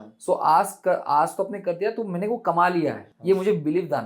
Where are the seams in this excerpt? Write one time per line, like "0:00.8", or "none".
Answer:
0:03.1